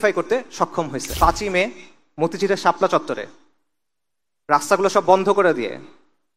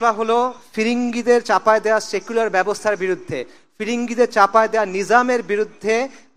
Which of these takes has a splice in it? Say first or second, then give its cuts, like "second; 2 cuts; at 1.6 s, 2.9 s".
first; 1 cut; at 1.0 s